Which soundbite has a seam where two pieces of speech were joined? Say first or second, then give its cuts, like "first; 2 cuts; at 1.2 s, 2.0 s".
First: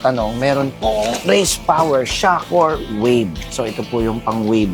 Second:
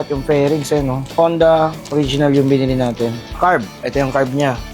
second; 2 cuts; at 1.0 s, 3.3 s